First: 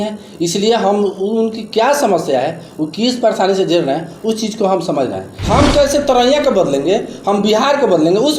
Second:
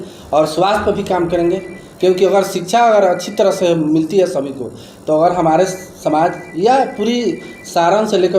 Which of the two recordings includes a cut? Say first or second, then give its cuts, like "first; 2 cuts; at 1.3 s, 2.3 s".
first; 1 cut; at 5.3 s